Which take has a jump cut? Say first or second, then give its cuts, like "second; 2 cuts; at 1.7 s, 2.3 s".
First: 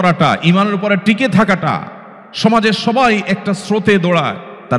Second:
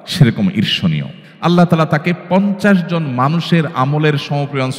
second; 1 cut; at 1.3 s